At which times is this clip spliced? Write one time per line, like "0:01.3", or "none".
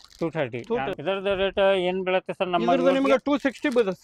0:00.9